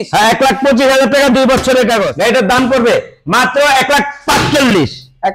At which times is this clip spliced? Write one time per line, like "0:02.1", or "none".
0:02.1